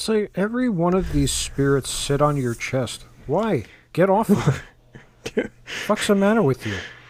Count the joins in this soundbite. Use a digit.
0